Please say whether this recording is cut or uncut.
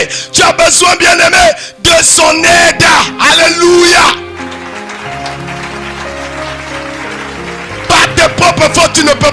uncut